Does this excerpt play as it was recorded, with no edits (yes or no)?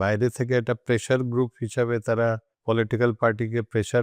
no